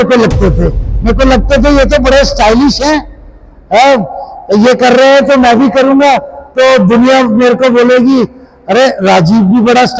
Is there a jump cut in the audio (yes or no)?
no